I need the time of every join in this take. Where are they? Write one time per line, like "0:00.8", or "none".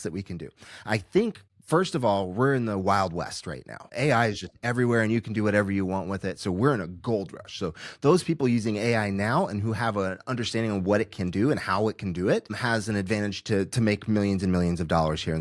0:01.5
0:03.8
0:12.6